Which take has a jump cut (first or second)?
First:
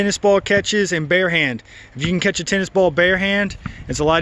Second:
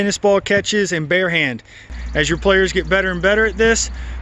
second